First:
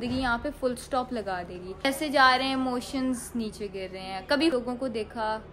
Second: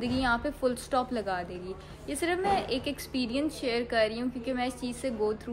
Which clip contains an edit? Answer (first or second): first